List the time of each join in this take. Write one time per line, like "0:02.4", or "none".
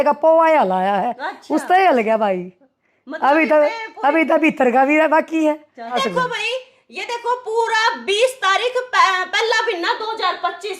0:06.0